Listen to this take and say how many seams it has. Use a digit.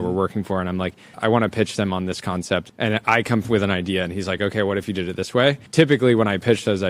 3